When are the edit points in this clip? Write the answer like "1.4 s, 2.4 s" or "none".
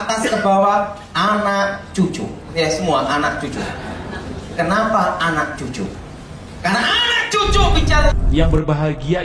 8.1 s